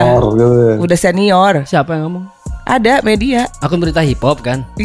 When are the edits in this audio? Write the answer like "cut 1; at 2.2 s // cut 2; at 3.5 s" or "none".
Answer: none